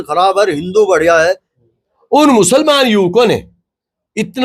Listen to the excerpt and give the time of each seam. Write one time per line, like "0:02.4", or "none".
0:01.5